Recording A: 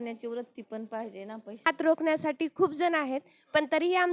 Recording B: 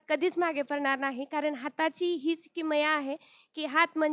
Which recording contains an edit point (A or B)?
A